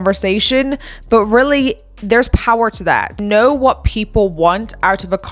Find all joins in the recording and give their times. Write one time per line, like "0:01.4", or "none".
0:03.2